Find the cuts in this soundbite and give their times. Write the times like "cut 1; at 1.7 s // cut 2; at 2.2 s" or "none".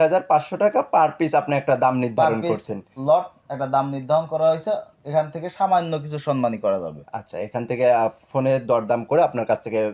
none

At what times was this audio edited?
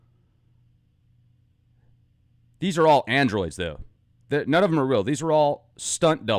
cut 1; at 5.3 s

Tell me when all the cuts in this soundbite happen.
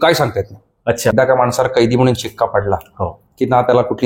cut 1; at 1.1 s

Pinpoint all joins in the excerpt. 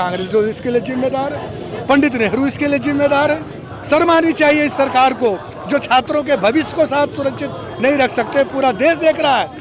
none

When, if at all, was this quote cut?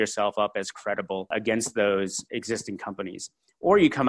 cut 1; at 1.3 s // cut 2; at 2.2 s

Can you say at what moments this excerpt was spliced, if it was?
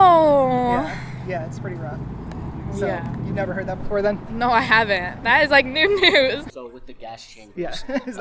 none

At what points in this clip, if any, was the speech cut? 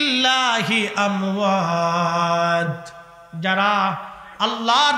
none

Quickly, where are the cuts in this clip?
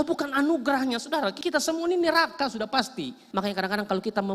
cut 1; at 1.4 s // cut 2; at 3.2 s

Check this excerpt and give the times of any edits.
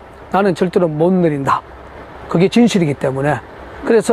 cut 1; at 1.3 s

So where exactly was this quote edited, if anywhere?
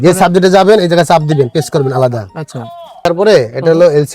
cut 1; at 3.1 s

